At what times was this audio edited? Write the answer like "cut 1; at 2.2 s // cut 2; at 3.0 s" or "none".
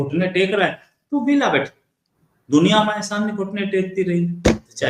none